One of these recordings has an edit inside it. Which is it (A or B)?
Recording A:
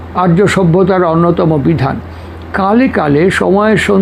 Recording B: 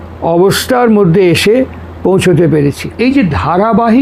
B